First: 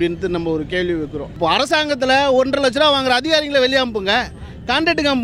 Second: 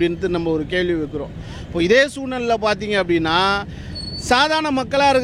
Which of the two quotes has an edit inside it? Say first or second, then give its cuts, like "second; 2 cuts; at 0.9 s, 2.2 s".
first; 1 cut; at 1.3 s